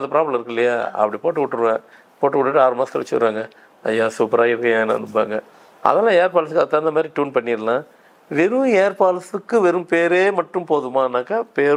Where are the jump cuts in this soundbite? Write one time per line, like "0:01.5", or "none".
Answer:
none

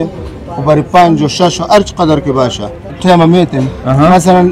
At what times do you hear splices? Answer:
0:02.9

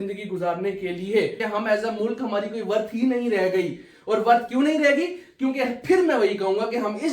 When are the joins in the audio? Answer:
0:01.4

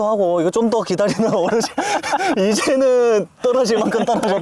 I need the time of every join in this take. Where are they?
none

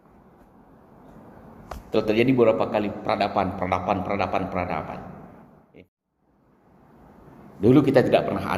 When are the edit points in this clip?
0:05.6

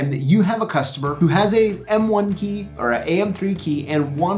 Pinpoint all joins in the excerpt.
0:01.0

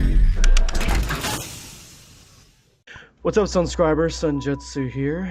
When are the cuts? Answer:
none

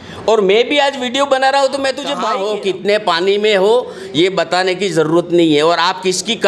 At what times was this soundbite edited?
0:02.3

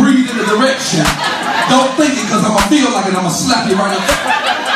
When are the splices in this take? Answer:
none

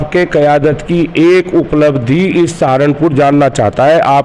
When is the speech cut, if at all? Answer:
none

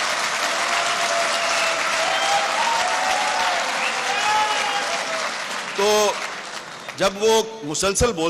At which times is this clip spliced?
none

